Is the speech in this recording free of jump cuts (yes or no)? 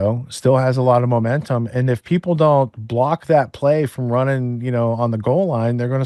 yes